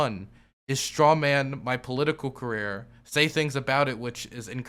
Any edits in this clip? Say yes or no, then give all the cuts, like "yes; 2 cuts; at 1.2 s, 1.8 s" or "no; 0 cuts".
no; 0 cuts